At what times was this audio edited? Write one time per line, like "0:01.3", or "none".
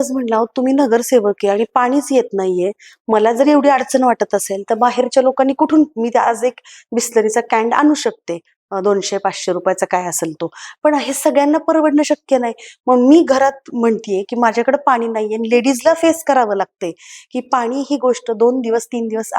none